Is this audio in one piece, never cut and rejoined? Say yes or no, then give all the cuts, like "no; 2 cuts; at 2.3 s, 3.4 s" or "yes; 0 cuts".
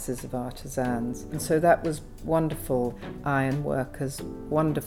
no; 2 cuts; at 1.4 s, 3.0 s